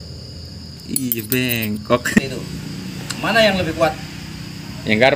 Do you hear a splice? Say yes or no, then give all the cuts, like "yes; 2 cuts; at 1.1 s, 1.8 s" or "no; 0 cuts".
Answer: yes; 1 cut; at 2.2 s